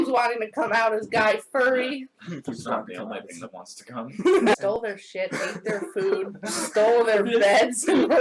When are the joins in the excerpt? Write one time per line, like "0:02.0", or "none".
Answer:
0:04.8